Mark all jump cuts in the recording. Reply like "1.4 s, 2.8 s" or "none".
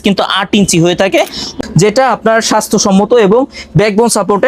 1.5 s